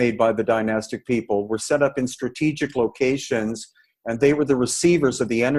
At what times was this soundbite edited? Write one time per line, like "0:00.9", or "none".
none

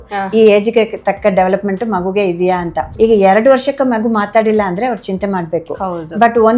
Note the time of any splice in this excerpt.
0:02.9

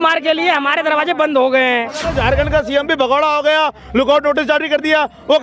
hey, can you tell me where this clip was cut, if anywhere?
0:02.1

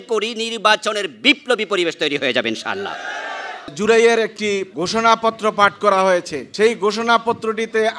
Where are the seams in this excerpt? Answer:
0:03.7
0:04.7
0:06.4

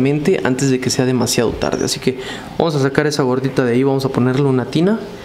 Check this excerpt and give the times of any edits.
none

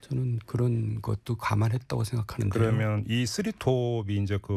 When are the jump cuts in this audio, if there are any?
none

